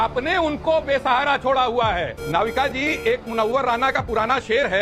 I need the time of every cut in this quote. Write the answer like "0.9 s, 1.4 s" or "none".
2.1 s